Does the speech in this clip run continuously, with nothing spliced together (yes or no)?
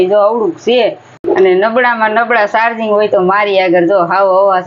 no